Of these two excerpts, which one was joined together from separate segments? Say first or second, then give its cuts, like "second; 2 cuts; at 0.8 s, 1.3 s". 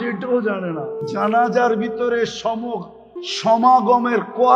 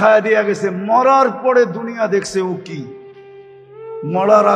first; 1 cut; at 1.0 s